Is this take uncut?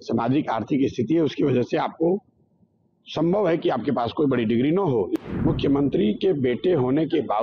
no; 1 cut; at 5.1 s

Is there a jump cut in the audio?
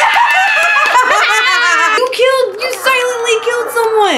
yes; 1 cut; at 2.0 s

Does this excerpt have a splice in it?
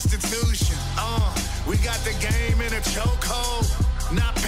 no; 0 cuts

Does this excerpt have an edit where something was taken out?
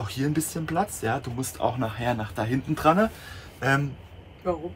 no; 0 cuts

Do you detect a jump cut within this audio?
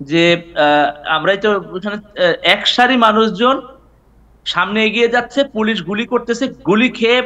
no; 0 cuts

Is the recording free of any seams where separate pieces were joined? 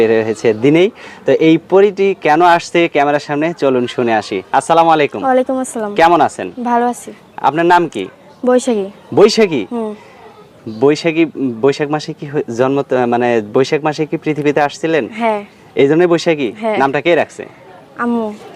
yes; 0 cuts

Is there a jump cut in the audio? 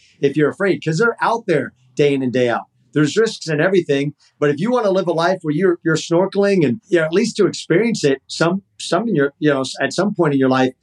yes; 1 cut; at 6.8 s

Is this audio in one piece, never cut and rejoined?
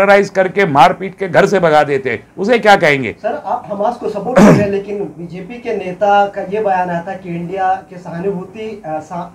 yes; 0 cuts

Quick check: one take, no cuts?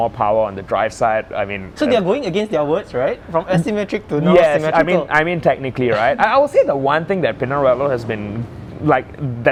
yes; 0 cuts

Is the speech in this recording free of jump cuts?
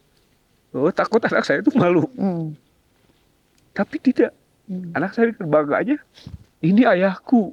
yes; 0 cuts

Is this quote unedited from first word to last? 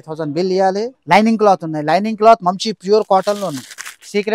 no; 1 cut; at 1.0 s

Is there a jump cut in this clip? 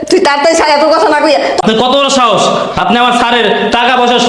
yes; 1 cut; at 1.6 s

